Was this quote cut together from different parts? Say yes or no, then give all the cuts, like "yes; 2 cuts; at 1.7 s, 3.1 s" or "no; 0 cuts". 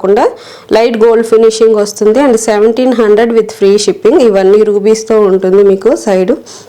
no; 0 cuts